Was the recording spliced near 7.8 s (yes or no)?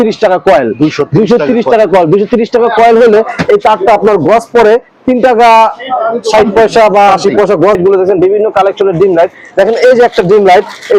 yes